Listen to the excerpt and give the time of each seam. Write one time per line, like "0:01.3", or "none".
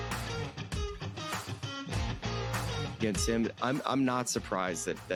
none